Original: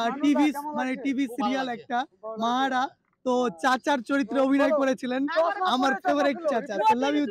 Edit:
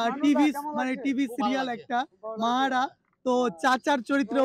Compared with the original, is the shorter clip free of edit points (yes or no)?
yes